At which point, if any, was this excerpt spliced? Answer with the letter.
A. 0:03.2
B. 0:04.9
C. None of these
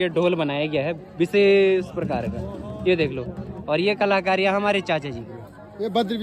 C